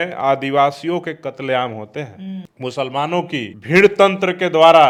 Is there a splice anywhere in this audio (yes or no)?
no